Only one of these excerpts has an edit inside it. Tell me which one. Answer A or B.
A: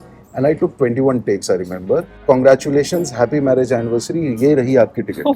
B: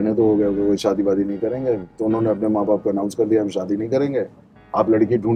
A